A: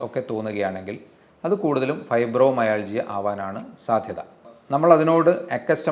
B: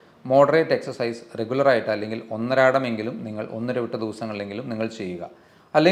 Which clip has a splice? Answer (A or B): A